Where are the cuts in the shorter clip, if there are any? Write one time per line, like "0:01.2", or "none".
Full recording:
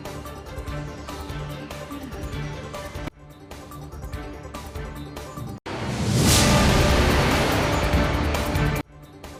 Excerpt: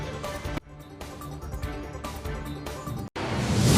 none